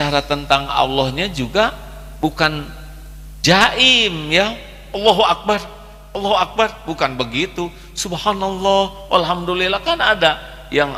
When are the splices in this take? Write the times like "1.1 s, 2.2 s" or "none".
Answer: none